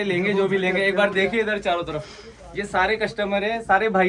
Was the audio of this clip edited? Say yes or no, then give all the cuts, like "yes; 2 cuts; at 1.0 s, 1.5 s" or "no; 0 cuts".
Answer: no; 0 cuts